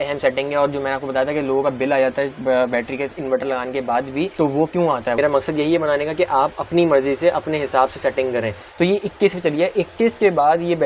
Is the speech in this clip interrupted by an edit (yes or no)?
yes